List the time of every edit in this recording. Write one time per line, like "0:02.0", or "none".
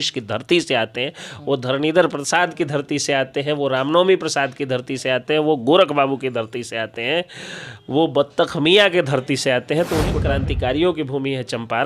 0:10.2